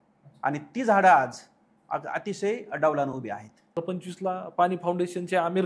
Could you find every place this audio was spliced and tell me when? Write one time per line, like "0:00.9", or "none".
0:03.8